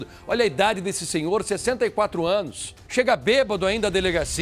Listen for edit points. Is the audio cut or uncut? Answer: cut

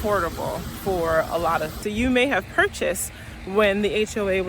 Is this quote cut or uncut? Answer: cut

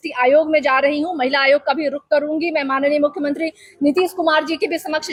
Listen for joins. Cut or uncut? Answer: uncut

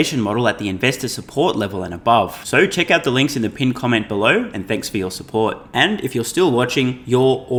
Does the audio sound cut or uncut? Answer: uncut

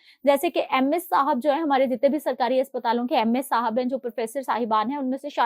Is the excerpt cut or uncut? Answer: uncut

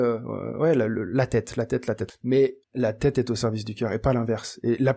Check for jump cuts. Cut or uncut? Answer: cut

